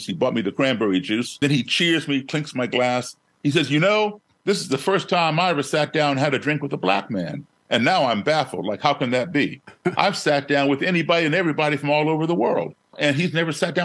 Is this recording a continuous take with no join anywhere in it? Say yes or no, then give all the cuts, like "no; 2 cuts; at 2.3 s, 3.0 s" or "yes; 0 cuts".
no; 3 cuts; at 1.4 s, 4.3 s, 13.0 s